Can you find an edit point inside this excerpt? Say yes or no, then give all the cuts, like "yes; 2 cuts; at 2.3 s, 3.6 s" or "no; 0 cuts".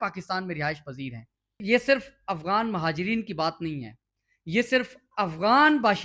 yes; 1 cut; at 1.4 s